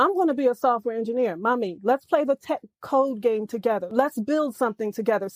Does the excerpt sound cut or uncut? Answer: uncut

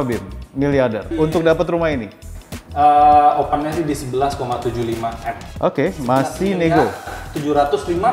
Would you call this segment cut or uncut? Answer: cut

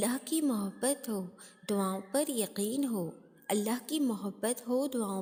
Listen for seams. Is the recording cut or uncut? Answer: uncut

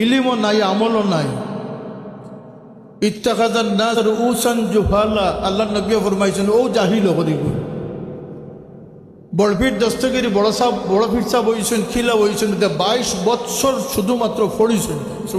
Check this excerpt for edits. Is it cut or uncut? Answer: cut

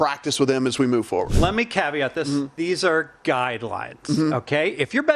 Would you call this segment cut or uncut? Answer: cut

